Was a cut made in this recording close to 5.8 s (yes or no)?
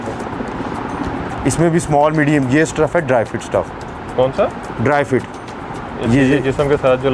no